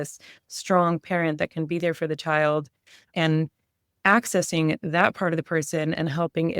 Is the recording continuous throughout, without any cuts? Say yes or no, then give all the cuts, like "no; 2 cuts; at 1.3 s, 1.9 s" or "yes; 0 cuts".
yes; 0 cuts